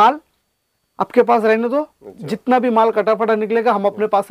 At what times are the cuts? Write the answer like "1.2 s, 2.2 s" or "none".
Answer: none